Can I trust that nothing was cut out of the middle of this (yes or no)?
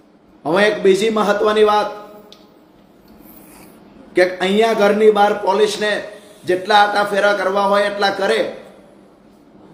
yes